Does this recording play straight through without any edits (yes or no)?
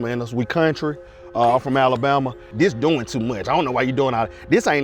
no